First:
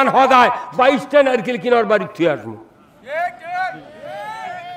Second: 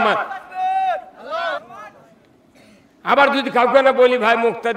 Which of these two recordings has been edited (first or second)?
second